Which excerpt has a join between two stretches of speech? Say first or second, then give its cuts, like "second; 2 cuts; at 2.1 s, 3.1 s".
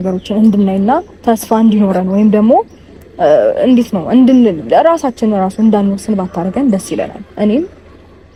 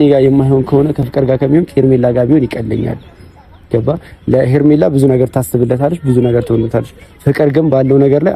second; 1 cut; at 1.1 s